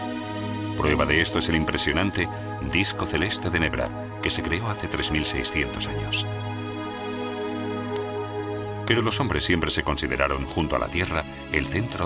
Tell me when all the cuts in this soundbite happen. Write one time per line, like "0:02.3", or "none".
0:02.9